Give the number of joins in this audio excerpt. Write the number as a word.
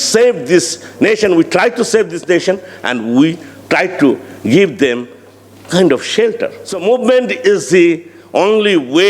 one